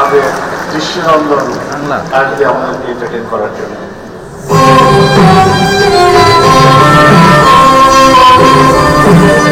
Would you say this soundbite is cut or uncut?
uncut